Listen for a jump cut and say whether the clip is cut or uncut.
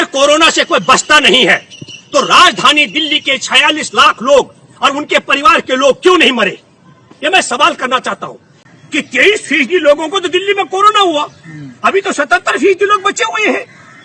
cut